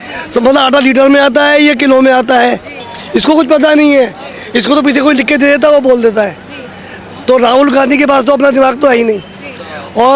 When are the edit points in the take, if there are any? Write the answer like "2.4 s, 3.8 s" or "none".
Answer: none